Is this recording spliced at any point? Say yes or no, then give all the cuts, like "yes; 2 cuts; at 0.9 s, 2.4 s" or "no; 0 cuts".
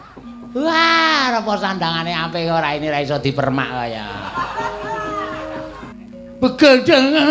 yes; 1 cut; at 5.9 s